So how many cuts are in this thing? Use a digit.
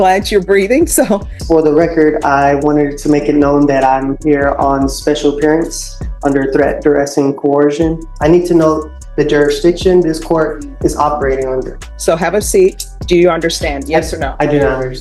4